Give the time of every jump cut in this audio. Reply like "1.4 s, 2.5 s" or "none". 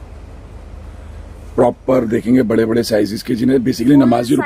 none